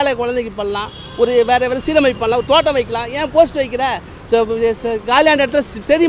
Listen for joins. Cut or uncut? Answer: uncut